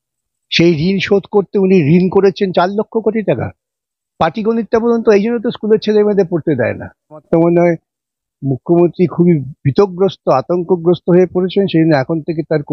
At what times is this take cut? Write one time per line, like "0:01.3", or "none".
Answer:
0:07.3